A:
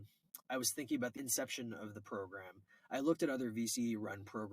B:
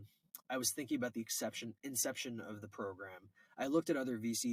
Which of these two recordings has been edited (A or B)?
A